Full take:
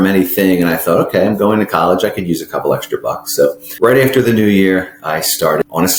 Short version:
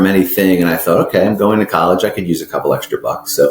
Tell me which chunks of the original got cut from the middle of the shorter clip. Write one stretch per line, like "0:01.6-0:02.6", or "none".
none